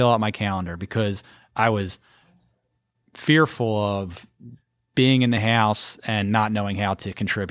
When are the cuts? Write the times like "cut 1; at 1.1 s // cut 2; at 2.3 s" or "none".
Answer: none